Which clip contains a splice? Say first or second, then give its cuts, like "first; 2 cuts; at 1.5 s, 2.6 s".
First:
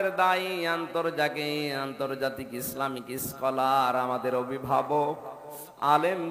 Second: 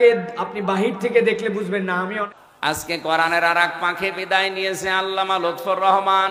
second; 1 cut; at 2.3 s